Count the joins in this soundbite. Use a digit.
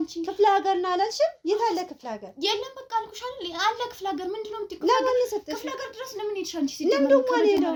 0